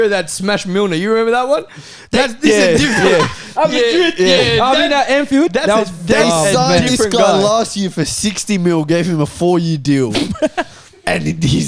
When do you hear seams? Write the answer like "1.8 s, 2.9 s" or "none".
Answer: none